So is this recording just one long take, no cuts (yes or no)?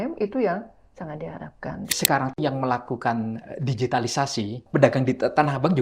no